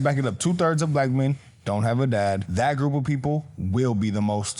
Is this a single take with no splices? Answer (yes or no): no